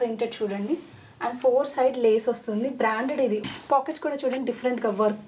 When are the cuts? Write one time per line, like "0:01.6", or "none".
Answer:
0:03.4